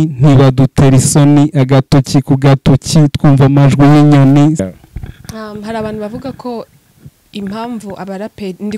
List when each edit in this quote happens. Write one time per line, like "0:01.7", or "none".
0:04.7